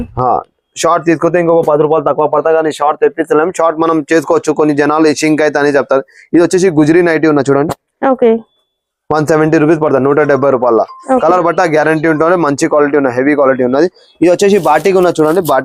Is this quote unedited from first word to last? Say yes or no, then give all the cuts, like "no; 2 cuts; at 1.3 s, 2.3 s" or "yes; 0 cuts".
yes; 0 cuts